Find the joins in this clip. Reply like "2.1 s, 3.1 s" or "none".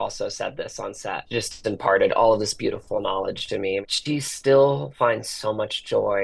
1.2 s, 3.9 s